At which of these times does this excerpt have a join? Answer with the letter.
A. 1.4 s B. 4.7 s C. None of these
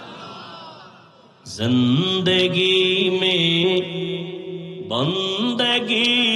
A